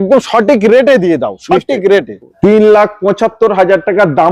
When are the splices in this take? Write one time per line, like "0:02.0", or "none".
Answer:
0:02.3